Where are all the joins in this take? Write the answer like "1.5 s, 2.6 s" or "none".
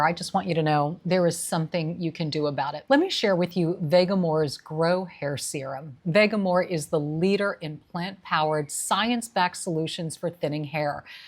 2.8 s